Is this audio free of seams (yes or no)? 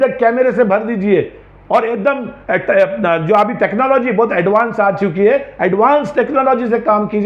yes